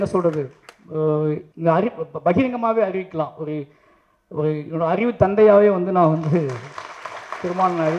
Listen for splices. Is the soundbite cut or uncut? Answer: cut